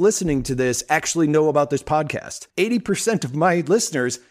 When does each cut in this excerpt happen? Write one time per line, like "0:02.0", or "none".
0:02.4